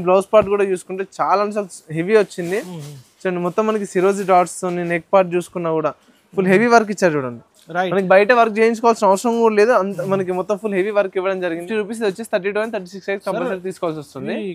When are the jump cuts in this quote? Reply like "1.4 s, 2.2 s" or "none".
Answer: 11.6 s